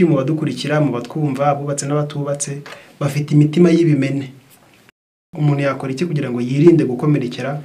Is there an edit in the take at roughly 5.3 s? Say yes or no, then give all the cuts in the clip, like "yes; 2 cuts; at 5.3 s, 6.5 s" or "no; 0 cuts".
yes; 1 cut; at 5.3 s